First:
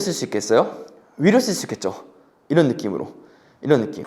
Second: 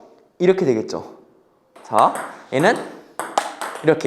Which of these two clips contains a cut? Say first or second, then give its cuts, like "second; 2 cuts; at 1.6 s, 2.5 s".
second; 1 cut; at 1.7 s